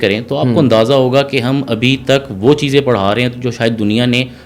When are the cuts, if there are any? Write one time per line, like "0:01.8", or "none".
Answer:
none